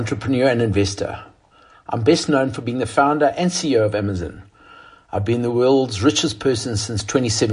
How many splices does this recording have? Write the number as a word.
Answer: zero